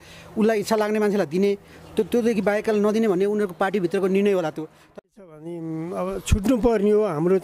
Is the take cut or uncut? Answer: cut